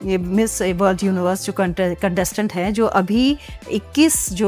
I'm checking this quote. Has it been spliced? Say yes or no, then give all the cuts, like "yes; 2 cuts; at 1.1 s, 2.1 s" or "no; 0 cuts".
no; 0 cuts